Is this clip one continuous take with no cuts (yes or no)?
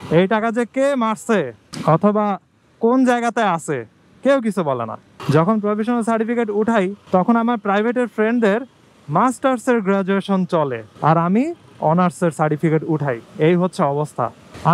no